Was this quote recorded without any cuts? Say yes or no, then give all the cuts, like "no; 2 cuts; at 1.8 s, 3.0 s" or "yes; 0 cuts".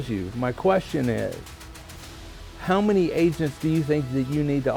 yes; 0 cuts